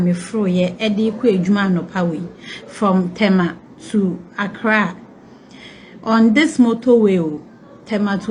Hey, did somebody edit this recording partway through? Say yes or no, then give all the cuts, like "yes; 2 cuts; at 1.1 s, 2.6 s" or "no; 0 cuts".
no; 0 cuts